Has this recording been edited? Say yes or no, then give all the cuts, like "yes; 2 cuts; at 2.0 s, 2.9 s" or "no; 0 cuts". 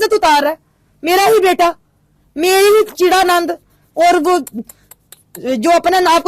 no; 0 cuts